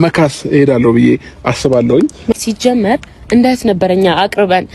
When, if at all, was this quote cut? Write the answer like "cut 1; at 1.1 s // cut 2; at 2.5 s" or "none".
cut 1; at 2.3 s